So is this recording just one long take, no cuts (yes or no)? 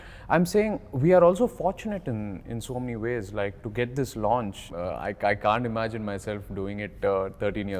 no